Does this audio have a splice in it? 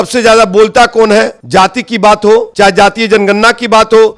yes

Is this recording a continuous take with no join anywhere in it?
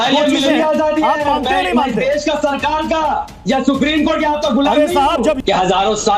no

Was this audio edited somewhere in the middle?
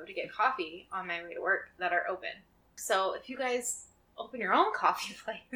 yes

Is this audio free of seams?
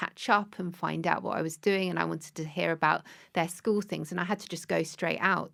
yes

